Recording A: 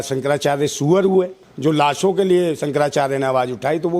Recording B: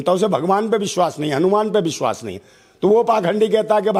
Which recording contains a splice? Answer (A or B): A